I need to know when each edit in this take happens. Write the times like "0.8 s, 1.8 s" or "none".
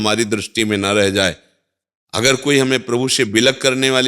none